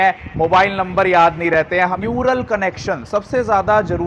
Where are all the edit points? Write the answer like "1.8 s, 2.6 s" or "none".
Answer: 1.9 s